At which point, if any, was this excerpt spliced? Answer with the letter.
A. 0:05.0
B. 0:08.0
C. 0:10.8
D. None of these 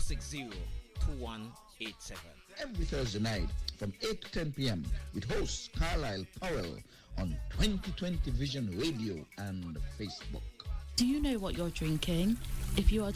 C